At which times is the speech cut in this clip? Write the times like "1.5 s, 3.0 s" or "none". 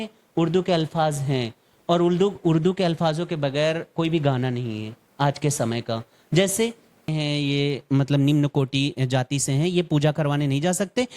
7.0 s

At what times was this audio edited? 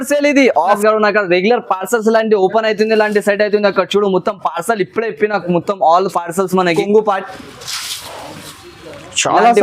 0.8 s, 6.7 s

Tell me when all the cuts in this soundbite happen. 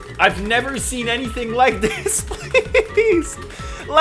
none

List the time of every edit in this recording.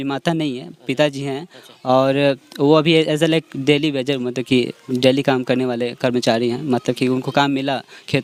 none

